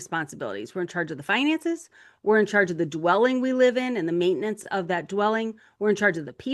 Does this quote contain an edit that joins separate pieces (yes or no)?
no